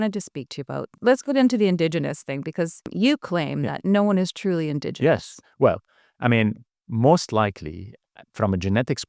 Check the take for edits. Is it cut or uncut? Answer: cut